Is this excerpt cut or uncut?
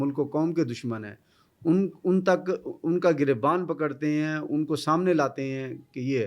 uncut